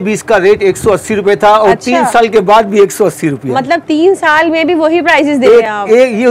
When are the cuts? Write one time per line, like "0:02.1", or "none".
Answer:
none

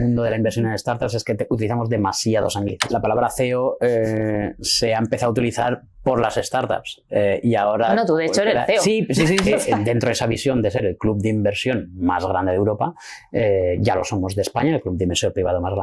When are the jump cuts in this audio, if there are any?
0:02.9
0:09.7

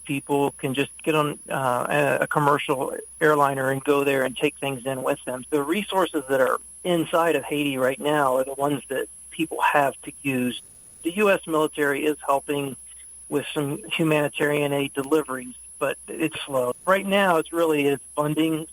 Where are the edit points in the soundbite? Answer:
0:05.3
0:10.6
0:13.8
0:16.8

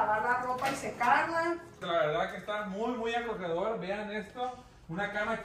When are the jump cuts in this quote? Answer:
0:01.8

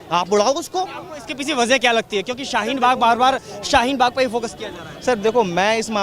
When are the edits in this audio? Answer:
none

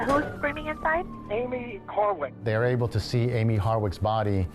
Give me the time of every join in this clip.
0:01.2
0:02.3

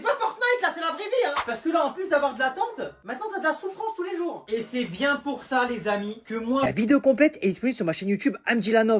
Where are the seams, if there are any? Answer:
0:06.6

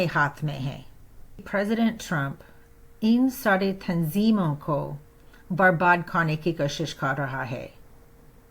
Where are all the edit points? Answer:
0:01.4

